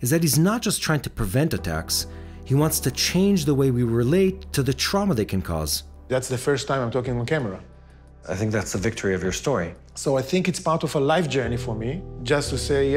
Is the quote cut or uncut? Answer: uncut